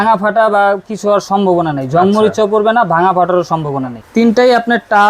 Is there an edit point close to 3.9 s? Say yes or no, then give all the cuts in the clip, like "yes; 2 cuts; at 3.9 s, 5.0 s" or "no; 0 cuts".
yes; 1 cut; at 3.9 s